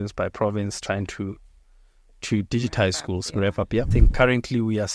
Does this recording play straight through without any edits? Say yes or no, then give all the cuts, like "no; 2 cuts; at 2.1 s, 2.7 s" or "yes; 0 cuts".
no; 1 cut; at 3.9 s